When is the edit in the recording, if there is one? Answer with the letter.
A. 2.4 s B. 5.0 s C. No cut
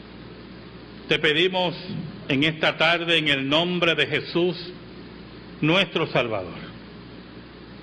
A